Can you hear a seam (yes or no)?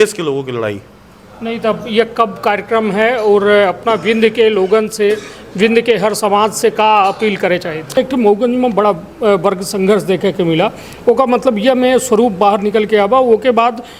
yes